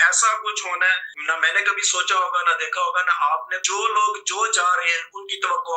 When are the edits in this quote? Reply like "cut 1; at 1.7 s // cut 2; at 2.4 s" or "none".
cut 1; at 1.1 s // cut 2; at 3.6 s